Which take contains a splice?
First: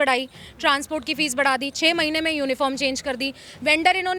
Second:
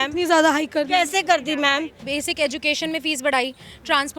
second; 1 cut; at 2.0 s

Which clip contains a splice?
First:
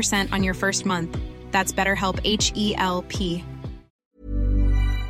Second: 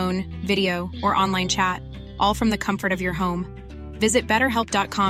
first; 1 cut; at 4.0 s

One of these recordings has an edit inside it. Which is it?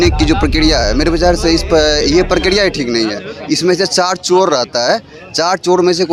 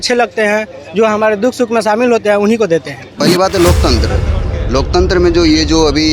second; 1 cut; at 3.1 s

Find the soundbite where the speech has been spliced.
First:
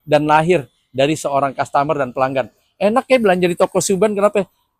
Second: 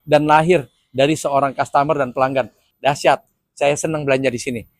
second; 1 cut; at 2.6 s

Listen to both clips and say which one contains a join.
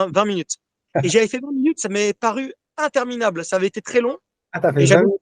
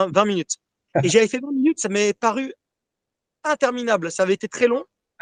first; 1 cut; at 2.6 s

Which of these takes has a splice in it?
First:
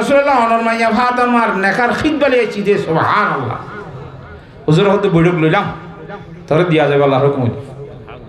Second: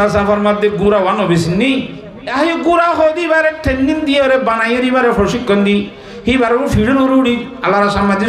second; 1 cut; at 2.2 s

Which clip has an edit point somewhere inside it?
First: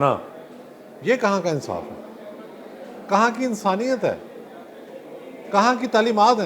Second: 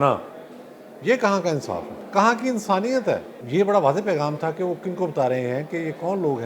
second; 2 cuts; at 2.0 s, 3.3 s

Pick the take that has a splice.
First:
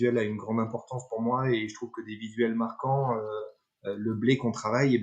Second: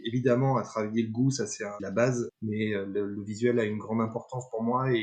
second; 2 cuts; at 1.8 s, 2.4 s

